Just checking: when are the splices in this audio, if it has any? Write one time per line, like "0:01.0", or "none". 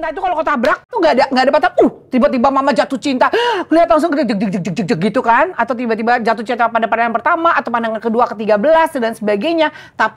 0:00.9